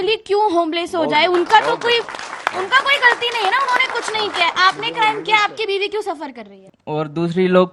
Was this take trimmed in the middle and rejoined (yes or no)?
yes